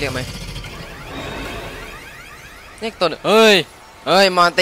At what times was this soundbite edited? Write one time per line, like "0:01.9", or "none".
none

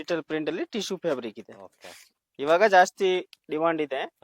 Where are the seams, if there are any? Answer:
none

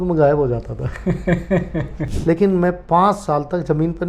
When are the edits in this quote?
0:02.0

